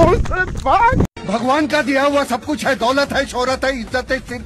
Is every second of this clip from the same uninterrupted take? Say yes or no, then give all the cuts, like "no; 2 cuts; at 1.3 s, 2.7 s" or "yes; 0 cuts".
no; 1 cut; at 1.2 s